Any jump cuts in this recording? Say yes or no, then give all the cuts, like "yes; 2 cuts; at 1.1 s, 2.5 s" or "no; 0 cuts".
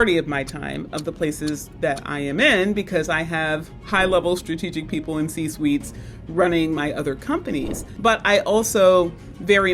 yes; 1 cut; at 7.8 s